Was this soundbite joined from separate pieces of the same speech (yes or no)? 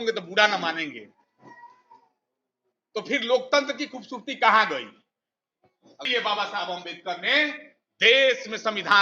yes